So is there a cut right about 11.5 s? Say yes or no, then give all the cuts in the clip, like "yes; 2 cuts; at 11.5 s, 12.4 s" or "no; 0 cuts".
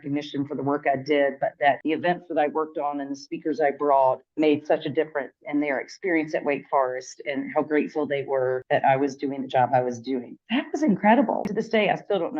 yes; 1 cut; at 11.5 s